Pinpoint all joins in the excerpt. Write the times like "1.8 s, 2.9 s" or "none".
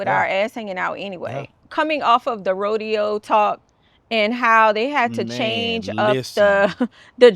1.6 s